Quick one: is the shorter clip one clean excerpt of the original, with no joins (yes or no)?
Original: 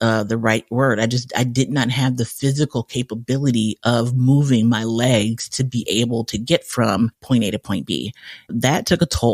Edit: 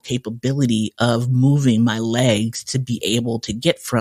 yes